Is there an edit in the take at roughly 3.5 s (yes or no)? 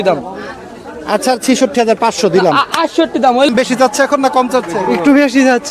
yes